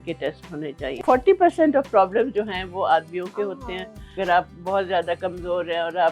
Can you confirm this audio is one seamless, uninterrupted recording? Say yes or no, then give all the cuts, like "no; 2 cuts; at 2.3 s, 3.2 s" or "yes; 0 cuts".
no; 2 cuts; at 1.0 s, 4.2 s